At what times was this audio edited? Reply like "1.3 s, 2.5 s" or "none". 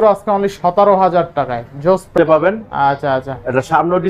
2.1 s